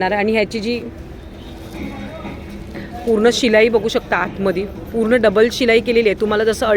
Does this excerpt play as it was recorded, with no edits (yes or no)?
yes